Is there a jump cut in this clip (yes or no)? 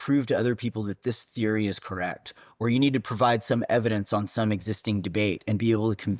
no